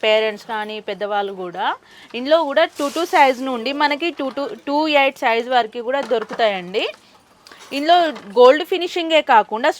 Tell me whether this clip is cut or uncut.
uncut